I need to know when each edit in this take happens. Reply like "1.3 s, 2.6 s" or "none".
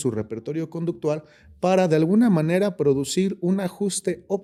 none

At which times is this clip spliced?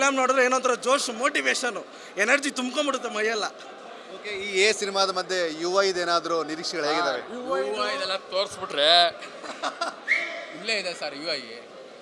none

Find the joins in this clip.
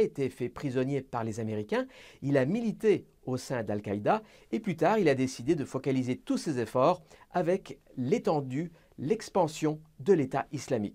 8.5 s

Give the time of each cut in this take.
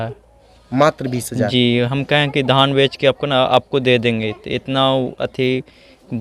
none

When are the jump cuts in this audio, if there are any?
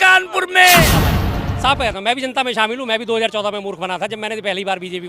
0.9 s

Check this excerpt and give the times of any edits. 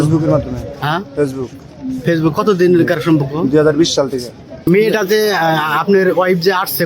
4.7 s

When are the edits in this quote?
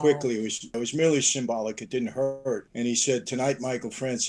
0.7 s, 2.7 s

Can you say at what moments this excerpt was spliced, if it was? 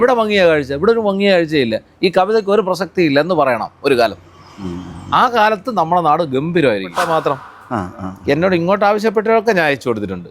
6.9 s

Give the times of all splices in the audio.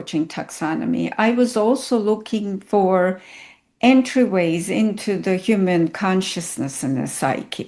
none

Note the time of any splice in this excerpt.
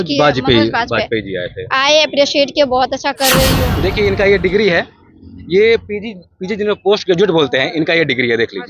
3.7 s

